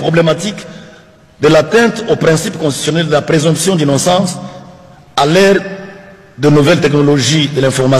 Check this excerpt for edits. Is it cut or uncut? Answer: uncut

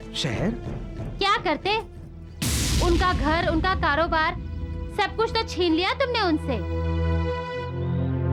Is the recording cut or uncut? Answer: uncut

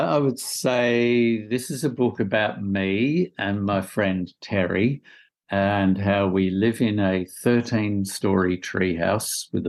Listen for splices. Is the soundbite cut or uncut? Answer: uncut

